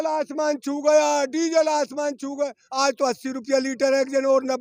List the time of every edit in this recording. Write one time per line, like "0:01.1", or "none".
none